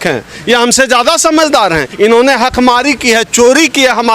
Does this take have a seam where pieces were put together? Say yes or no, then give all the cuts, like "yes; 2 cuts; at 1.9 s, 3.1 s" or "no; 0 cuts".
yes; 1 cut; at 1.9 s